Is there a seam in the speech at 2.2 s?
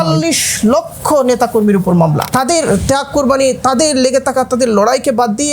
yes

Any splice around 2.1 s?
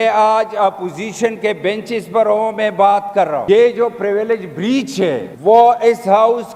no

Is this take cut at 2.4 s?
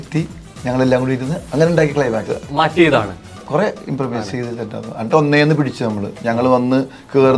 yes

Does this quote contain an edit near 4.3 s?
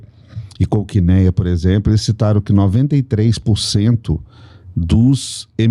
no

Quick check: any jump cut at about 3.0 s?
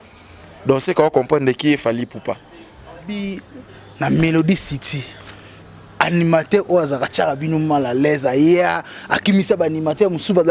yes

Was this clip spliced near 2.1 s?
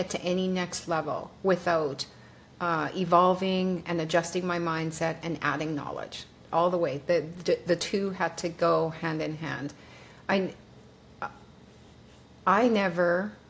no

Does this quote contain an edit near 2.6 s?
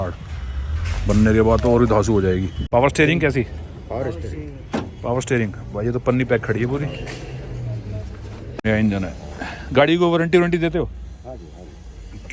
yes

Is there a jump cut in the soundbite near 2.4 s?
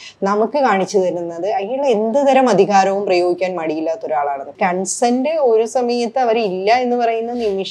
no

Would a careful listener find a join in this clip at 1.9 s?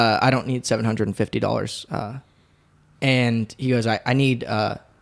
no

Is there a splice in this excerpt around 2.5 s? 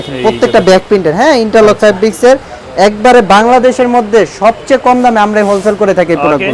no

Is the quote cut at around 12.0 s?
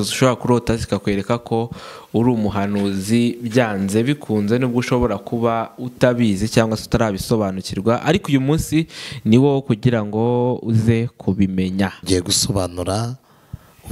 yes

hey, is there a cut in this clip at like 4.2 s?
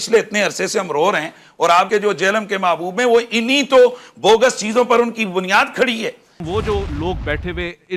no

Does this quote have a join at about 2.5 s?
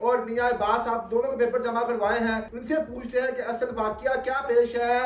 yes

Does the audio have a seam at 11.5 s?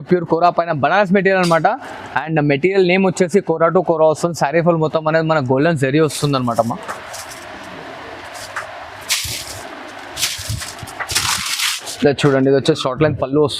no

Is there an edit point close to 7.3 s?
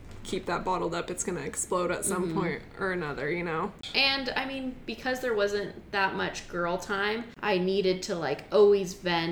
yes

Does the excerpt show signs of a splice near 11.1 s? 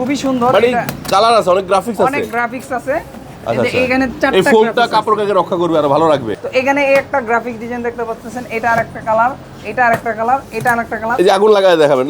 yes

